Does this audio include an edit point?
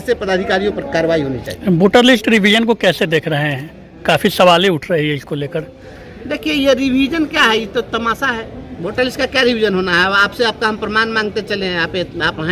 no; 0 cuts

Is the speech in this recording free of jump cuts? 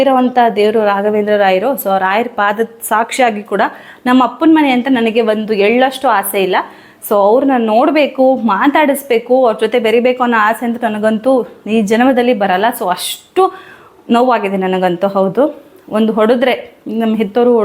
yes; 0 cuts

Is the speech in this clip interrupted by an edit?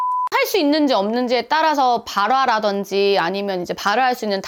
no; 0 cuts

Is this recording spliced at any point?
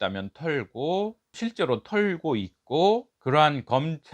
yes; 2 cuts; at 1.3 s, 3.1 s

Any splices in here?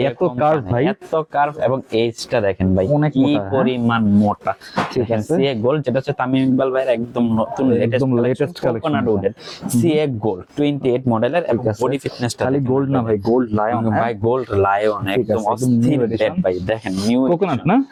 no; 0 cuts

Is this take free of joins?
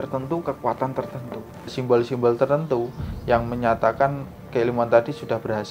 no; 1 cut; at 1.8 s

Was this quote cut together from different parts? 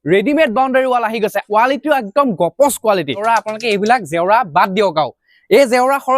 yes; 2 cuts; at 1.4 s, 3.2 s

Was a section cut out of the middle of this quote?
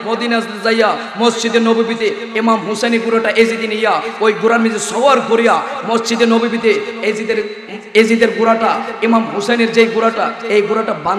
no; 0 cuts

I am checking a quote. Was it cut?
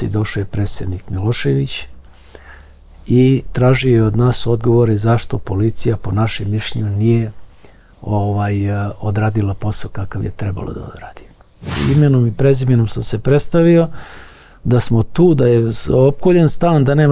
yes; 1 cut; at 11.7 s

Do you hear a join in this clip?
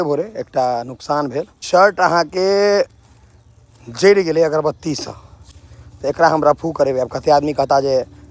yes; 1 cut; at 1.6 s

